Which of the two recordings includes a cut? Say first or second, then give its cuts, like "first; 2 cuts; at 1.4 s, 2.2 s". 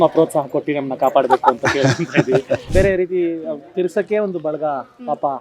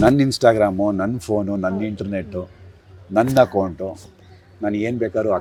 first; 1 cut; at 2.7 s